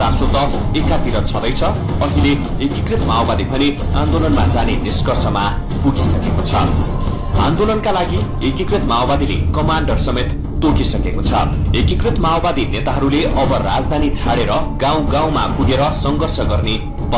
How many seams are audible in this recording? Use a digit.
0